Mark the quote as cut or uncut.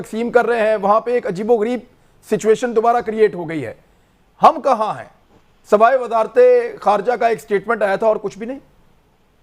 uncut